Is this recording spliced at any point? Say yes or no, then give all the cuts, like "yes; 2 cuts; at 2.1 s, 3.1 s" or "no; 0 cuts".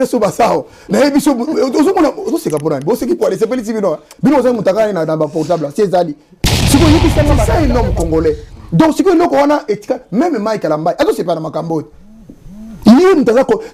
yes; 1 cut; at 7.5 s